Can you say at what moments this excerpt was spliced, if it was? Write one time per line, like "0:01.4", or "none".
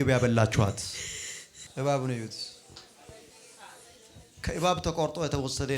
0:01.6
0:04.3